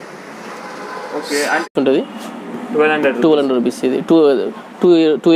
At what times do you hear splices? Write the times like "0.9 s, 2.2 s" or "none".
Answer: 1.7 s